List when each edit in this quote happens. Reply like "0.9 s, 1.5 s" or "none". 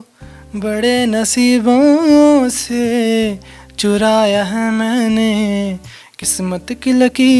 none